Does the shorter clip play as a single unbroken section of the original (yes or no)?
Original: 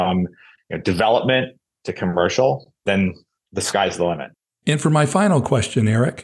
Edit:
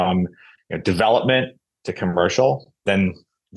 yes